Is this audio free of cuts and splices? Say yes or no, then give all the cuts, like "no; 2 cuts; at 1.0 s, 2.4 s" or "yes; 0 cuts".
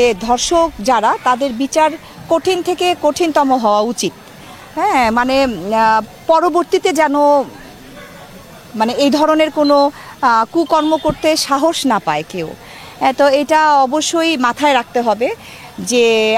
yes; 0 cuts